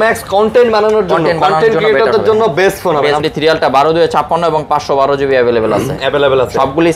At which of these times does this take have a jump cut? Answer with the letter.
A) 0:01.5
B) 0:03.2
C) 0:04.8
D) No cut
B